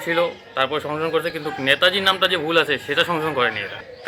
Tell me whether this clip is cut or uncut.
uncut